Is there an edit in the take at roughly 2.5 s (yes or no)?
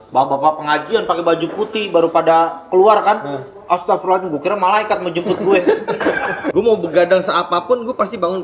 no